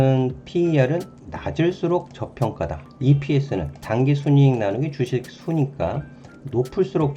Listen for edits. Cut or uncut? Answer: cut